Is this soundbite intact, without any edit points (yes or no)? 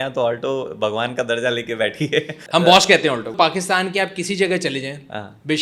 no